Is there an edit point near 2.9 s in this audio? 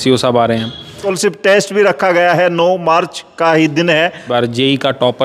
no; 2 cuts; at 1.0 s, 4.2 s

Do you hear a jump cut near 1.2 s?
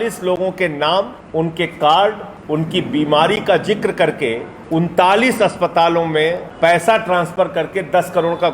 yes; 4 cuts; at 1.2 s, 2.3 s, 4.5 s, 6.5 s

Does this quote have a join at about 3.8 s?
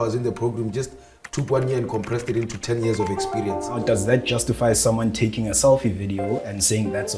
yes; 1 cut; at 3.8 s

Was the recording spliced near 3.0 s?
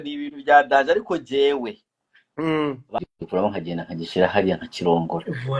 yes; 1 cut; at 3.0 s

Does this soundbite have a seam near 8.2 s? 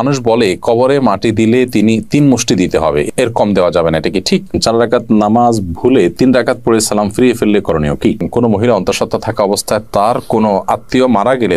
yes; 2 cuts; at 4.5 s, 8.2 s

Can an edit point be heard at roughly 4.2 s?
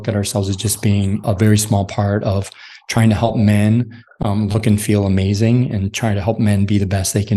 no; 1 cut; at 1.2 s

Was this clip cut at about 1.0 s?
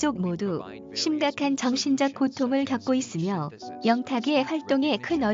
no; 1 cut; at 4.3 s

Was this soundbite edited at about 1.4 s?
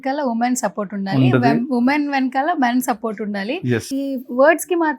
no; 0 cuts

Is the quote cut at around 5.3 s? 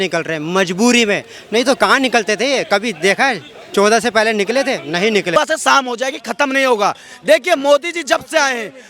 yes; 1 cut; at 5.3 s

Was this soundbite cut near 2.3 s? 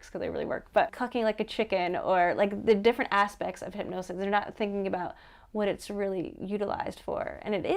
no; 1 cut; at 0.9 s

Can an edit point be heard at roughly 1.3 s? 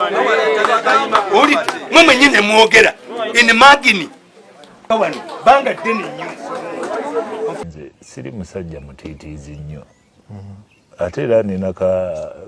no; 1 cut; at 7.6 s

